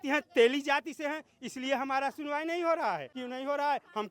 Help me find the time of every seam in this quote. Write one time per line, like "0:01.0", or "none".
0:03.2